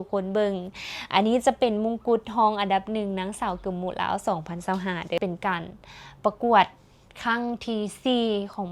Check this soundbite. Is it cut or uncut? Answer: cut